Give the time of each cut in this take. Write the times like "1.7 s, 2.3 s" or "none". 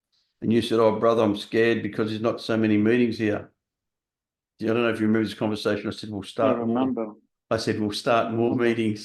none